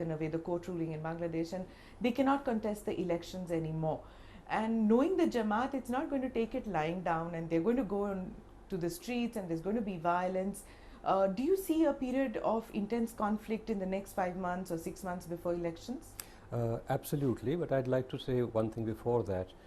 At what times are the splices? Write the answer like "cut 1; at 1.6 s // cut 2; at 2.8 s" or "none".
cut 1; at 15.8 s